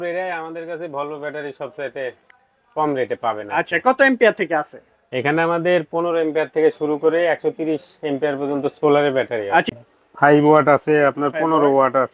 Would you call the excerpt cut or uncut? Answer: cut